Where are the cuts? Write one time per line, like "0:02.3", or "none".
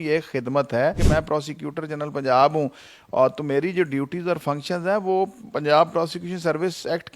0:01.0